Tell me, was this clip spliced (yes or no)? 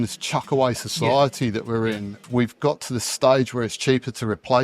yes